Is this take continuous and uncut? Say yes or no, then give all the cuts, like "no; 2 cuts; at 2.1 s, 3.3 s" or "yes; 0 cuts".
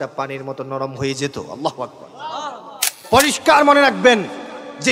no; 1 cut; at 2.9 s